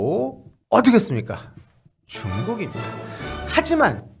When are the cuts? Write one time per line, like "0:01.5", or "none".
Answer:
0:03.3